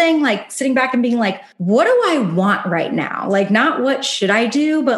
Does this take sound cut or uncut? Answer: cut